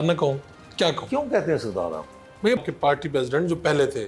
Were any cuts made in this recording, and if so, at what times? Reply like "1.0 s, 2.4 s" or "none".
2.6 s